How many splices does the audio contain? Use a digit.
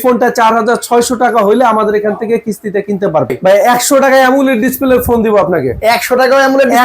1